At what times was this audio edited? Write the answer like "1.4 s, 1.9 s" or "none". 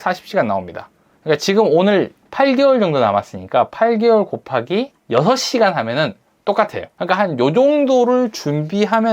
2.2 s, 5.0 s, 6.9 s

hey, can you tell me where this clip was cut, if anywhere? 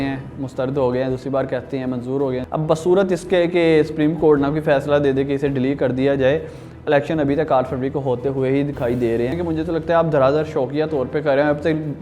2.4 s, 9.4 s

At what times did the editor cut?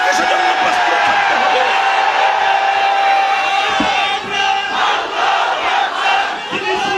none

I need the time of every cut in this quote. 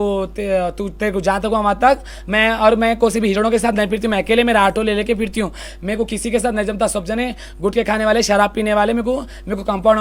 none

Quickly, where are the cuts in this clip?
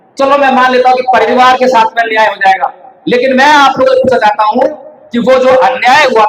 1.3 s

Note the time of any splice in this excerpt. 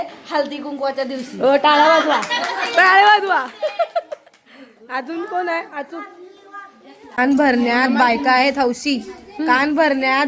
7.2 s

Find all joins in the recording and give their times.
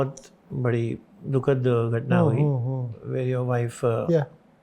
1.1 s

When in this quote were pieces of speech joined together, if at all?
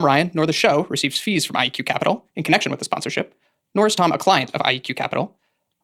none

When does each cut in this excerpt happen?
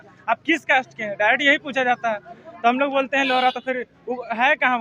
none

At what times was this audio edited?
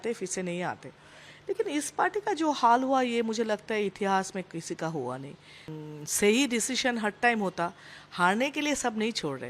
5.7 s

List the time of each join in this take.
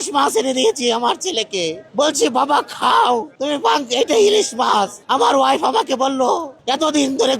1.8 s, 3.3 s, 5.0 s, 6.5 s

